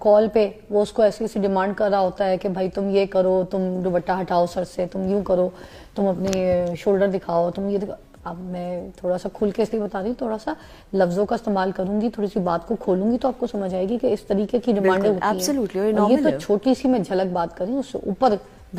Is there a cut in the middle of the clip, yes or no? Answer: no